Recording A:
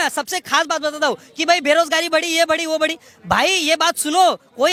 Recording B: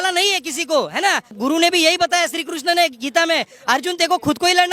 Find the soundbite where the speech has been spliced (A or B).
B